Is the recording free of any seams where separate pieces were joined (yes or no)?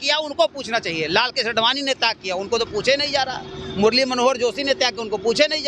yes